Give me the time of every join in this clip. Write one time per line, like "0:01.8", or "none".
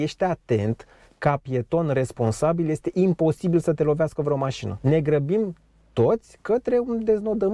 0:04.7